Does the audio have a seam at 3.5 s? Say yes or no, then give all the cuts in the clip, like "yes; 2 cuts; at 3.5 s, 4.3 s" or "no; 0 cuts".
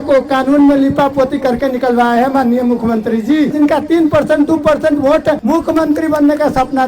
yes; 2 cuts; at 3.5 s, 5.4 s